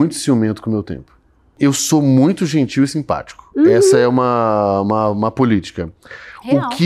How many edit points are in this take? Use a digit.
1